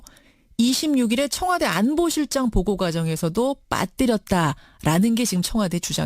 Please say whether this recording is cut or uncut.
cut